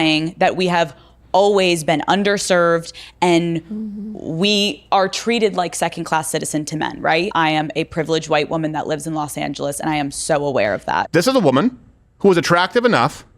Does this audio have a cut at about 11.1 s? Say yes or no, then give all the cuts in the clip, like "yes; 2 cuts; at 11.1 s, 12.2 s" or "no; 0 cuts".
yes; 2 cuts; at 7.3 s, 11.1 s